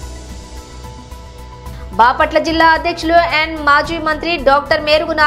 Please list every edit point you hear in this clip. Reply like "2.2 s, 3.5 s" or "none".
1.0 s